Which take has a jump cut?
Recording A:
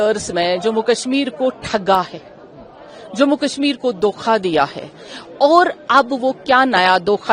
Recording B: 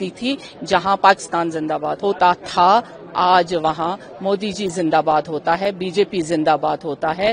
B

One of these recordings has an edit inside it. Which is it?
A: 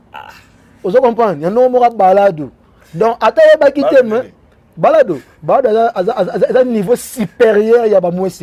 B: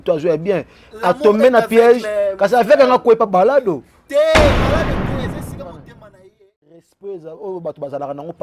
B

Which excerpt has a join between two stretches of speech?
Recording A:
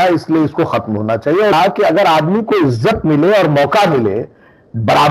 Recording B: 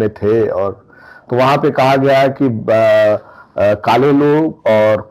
A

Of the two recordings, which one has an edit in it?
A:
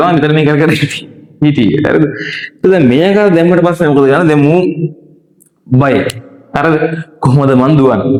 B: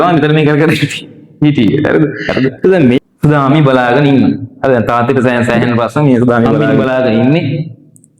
B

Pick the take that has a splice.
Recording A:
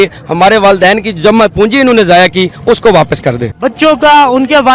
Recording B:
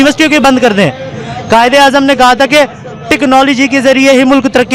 A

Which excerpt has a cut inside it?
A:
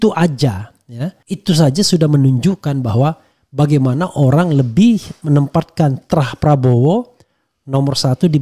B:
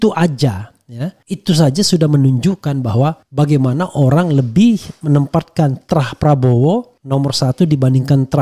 B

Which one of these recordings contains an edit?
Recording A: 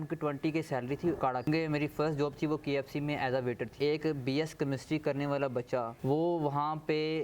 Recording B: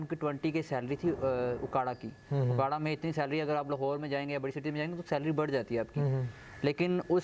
A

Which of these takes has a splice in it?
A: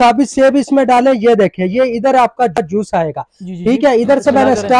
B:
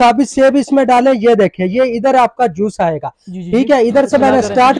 B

